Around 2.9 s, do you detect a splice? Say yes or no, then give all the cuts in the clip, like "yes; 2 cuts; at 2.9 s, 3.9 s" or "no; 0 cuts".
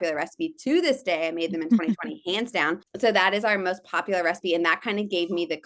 yes; 1 cut; at 2.9 s